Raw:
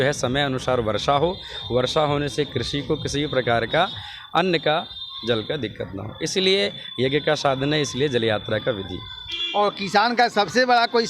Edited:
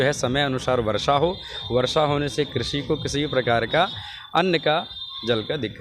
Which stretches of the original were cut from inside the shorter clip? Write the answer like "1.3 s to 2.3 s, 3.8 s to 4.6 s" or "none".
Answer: none